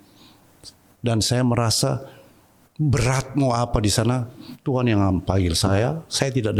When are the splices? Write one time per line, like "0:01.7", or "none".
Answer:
none